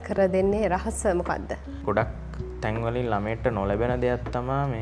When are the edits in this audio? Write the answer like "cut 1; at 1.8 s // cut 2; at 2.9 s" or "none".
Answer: cut 1; at 1.7 s